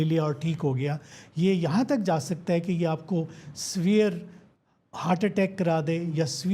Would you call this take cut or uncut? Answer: uncut